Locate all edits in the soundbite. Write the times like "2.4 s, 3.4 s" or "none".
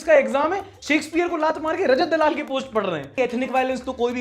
3.1 s